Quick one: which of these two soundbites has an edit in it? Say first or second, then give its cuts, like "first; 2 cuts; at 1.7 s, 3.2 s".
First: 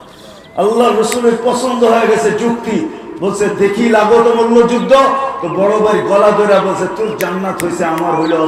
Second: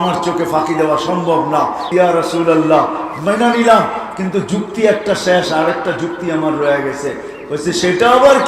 second; 1 cut; at 1.9 s